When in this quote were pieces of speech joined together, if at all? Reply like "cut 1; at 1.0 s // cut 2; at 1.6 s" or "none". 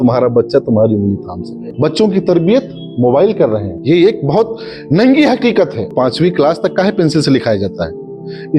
cut 1; at 1.7 s // cut 2; at 5.9 s